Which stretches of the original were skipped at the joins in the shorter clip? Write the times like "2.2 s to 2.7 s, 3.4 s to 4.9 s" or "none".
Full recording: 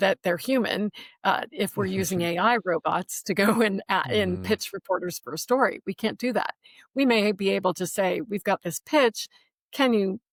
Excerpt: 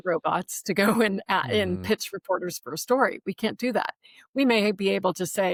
none